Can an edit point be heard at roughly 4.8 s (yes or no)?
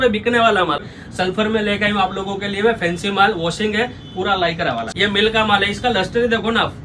yes